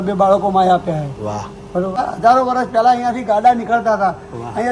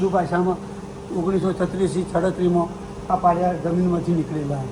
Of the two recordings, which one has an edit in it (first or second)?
first